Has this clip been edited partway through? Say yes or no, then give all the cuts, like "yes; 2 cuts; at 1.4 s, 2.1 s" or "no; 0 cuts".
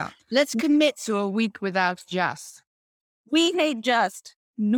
no; 0 cuts